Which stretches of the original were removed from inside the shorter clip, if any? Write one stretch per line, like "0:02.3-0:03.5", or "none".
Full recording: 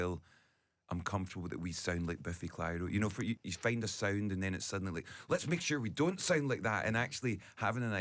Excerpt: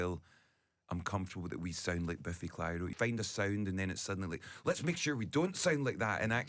0:02.9-0:03.5